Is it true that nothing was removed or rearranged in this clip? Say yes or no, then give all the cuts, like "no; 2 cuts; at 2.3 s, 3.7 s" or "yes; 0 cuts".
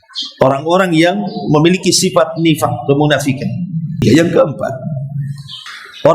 no; 1 cut; at 4.0 s